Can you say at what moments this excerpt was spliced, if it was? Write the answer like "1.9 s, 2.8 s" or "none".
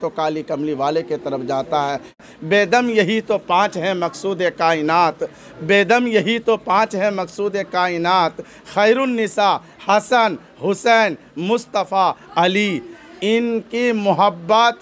2.2 s